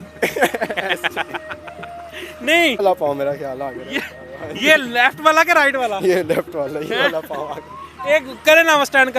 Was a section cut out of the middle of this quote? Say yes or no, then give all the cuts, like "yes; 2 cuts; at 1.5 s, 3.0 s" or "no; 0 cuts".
yes; 1 cut; at 2.8 s